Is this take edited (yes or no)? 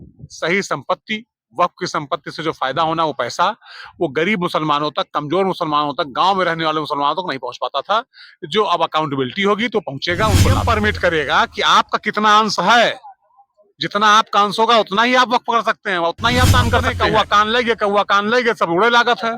yes